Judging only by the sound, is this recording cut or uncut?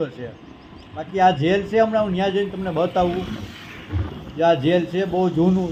uncut